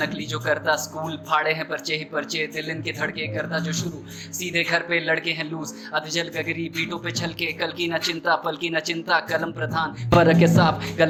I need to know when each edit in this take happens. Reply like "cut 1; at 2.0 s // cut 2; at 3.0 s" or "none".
none